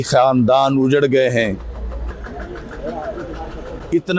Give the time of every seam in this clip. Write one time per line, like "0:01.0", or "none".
0:02.1